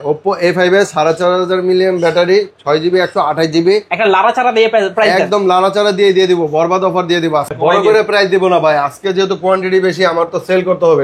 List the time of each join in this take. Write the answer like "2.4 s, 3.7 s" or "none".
7.5 s